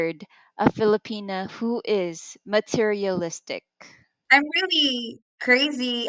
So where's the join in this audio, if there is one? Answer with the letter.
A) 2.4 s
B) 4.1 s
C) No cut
B